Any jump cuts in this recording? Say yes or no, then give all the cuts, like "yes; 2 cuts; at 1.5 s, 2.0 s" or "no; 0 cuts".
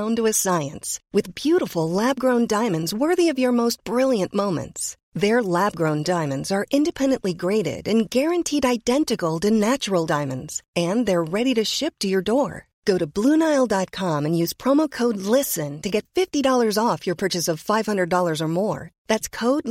no; 0 cuts